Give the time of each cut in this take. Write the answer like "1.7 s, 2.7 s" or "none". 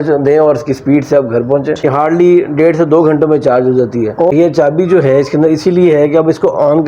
1.8 s, 4.1 s